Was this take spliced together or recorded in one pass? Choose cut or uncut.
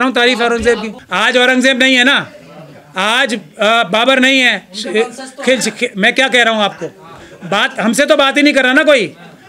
cut